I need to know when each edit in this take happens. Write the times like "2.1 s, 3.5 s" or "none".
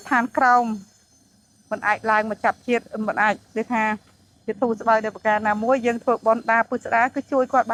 none